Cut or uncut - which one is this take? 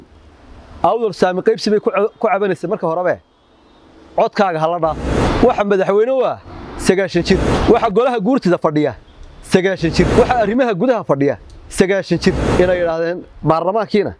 cut